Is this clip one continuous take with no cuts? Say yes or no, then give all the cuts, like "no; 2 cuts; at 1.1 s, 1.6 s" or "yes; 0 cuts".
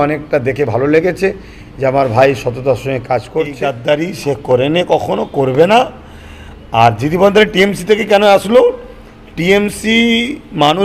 no; 1 cut; at 3.5 s